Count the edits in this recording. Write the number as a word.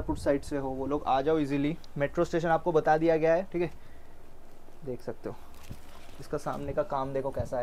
zero